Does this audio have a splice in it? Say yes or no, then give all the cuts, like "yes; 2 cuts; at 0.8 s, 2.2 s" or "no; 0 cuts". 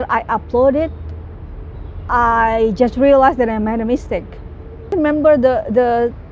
yes; 1 cut; at 4.9 s